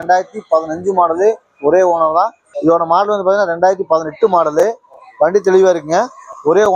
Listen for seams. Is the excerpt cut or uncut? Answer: cut